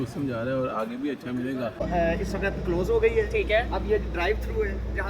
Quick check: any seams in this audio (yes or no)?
yes